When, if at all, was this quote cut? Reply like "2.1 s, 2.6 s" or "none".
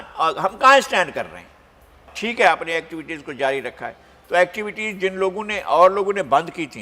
2.1 s